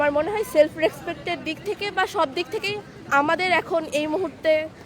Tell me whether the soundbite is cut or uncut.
uncut